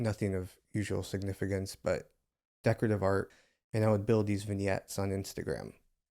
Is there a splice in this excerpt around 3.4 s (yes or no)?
yes